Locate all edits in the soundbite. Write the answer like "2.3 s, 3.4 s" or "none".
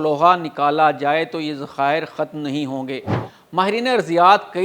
3.2 s